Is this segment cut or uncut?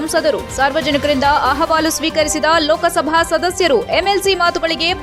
uncut